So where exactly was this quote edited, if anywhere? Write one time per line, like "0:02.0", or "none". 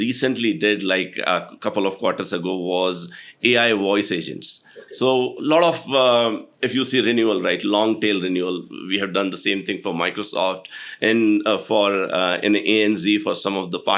none